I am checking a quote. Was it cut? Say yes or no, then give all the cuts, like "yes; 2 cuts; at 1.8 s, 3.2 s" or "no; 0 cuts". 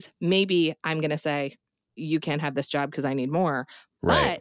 yes; 1 cut; at 1.8 s